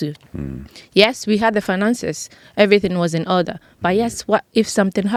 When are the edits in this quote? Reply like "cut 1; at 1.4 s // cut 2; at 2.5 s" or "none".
none